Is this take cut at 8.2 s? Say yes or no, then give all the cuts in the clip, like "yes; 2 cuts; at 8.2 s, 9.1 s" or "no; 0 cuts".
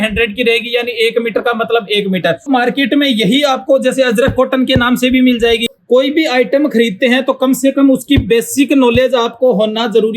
no; 2 cuts; at 2.5 s, 5.7 s